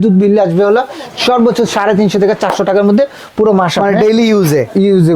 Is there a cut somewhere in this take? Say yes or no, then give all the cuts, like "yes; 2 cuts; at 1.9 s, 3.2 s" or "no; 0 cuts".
no; 0 cuts